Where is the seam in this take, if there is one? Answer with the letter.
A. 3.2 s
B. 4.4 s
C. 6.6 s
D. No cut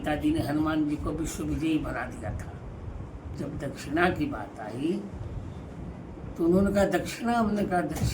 A